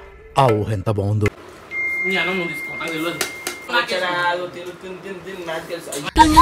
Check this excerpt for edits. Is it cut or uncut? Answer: cut